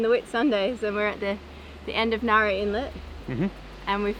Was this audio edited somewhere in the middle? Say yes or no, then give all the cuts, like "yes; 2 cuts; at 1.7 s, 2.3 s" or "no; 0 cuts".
no; 0 cuts